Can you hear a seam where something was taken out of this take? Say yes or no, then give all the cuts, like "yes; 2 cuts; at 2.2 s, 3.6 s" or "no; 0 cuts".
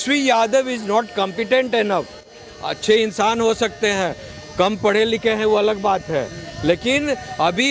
no; 0 cuts